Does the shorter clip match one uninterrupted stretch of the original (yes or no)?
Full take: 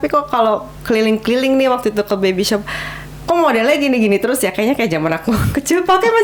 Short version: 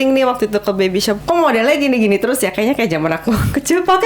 no